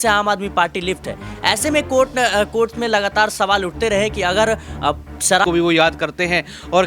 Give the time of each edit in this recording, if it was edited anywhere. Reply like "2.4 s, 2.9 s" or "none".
3.3 s, 5.4 s